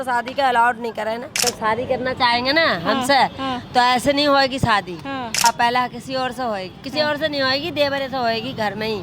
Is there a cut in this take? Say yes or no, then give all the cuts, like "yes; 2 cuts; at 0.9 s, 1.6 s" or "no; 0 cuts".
yes; 2 cuts; at 1.4 s, 5.4 s